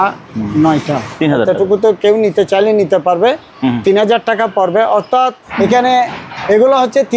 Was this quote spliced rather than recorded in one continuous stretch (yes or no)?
yes